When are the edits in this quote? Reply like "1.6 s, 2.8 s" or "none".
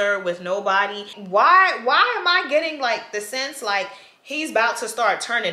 1.2 s